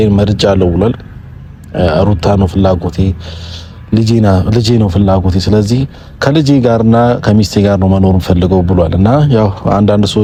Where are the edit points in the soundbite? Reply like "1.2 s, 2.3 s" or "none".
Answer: none